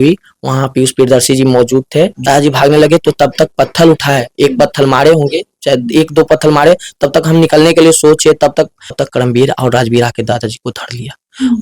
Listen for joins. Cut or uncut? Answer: cut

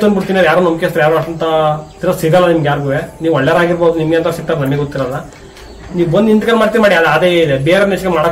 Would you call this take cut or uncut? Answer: uncut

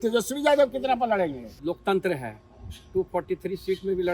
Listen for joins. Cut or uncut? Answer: cut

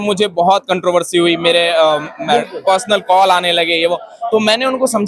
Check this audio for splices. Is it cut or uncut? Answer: uncut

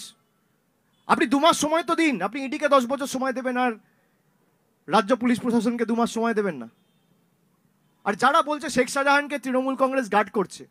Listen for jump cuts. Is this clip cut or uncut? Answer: uncut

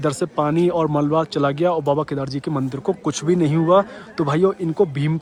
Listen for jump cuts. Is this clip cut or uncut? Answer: uncut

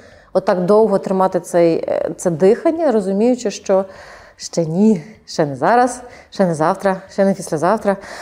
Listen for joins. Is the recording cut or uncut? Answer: uncut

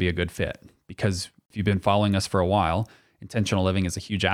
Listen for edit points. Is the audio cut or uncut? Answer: cut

